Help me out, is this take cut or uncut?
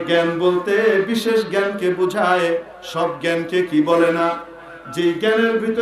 uncut